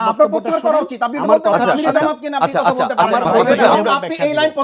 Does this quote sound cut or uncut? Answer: cut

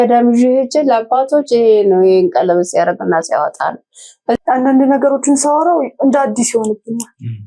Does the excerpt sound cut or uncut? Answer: cut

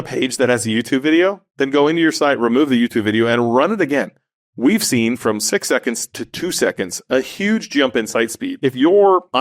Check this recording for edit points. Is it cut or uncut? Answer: cut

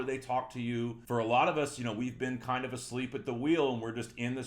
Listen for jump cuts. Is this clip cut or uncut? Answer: cut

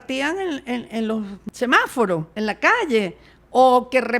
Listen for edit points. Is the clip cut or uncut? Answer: cut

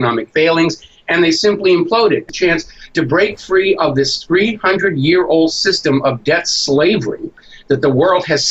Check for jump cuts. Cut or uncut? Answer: cut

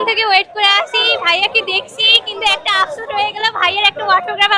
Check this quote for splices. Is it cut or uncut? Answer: uncut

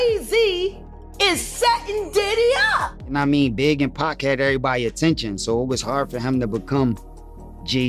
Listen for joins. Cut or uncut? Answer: cut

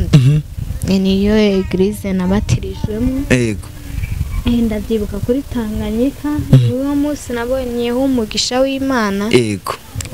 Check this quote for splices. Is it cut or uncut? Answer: uncut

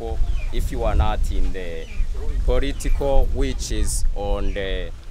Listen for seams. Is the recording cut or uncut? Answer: uncut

